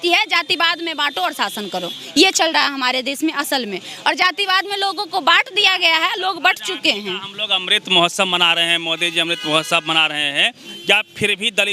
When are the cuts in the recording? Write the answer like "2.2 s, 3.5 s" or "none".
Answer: none